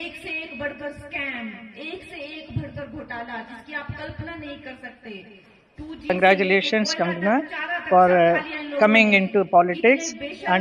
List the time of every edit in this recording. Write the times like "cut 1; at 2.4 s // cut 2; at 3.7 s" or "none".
cut 1; at 6.1 s